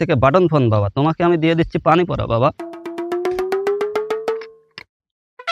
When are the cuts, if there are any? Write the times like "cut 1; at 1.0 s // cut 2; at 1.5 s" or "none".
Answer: none

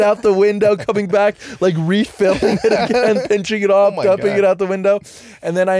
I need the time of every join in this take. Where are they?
none

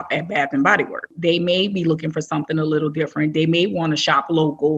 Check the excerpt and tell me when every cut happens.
cut 1; at 1.1 s

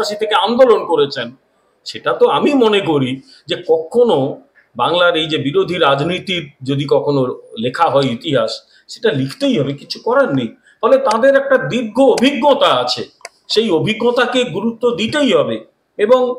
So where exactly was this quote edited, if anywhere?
none

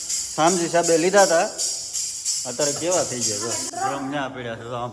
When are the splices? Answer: cut 1; at 3.6 s

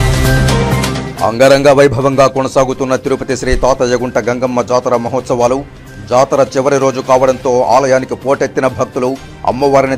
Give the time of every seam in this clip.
none

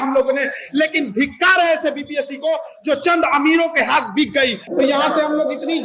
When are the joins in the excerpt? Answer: cut 1; at 4.6 s

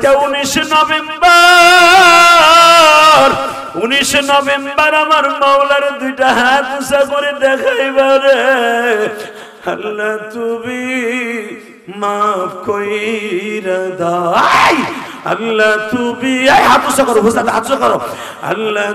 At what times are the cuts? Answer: none

